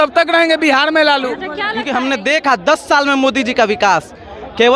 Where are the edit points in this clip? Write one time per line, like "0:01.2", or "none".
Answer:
0:01.7